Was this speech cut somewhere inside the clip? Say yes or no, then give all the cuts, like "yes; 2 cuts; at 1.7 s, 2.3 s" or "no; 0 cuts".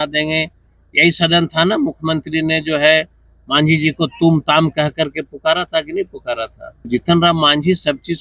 yes; 1 cut; at 6.9 s